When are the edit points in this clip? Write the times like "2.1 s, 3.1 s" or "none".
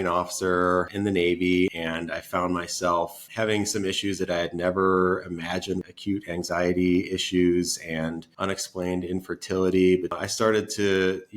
0.9 s, 1.8 s, 3.2 s, 5.9 s, 8.3 s, 10.2 s